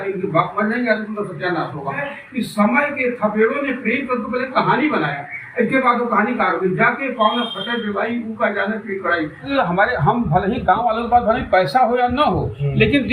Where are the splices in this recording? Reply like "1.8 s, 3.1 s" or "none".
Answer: 2.1 s, 9.5 s

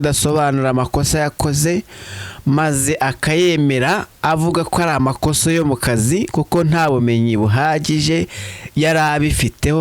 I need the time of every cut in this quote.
none

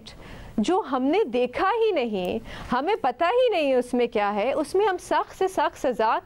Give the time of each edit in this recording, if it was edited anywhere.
none

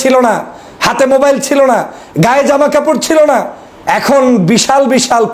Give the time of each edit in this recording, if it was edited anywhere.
none

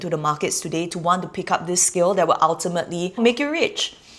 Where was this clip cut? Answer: 3.2 s

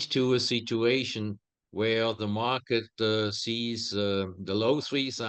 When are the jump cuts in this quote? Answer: none

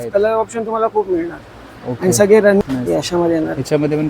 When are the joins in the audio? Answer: 2.6 s

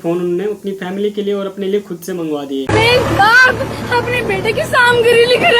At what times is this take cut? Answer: 2.7 s

